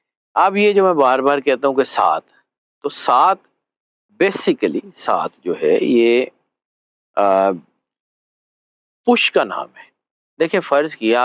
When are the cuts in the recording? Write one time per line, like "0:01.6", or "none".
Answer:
0:10.2